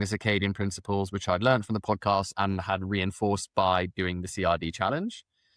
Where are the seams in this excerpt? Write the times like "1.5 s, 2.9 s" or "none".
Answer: none